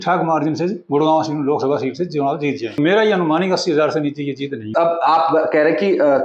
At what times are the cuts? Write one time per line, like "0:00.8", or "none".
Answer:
0:02.8
0:04.7